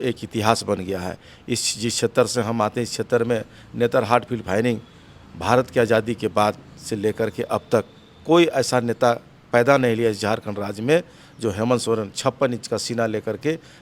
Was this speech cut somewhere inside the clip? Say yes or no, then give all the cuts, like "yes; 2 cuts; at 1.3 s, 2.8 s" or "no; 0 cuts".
no; 0 cuts